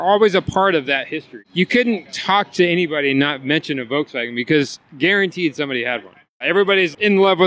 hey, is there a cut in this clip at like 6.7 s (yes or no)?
yes